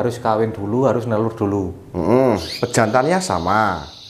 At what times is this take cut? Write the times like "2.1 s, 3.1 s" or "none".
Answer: 2.5 s